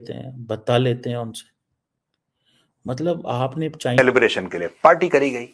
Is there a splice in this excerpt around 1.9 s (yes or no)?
no